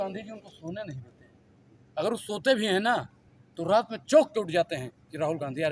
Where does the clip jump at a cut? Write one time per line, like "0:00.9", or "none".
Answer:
none